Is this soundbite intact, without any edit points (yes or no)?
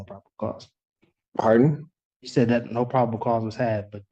yes